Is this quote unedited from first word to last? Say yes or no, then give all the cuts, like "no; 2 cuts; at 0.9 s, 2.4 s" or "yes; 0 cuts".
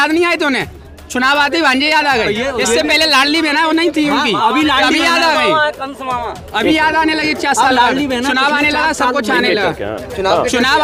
yes; 0 cuts